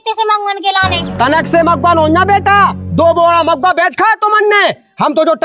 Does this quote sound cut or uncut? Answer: uncut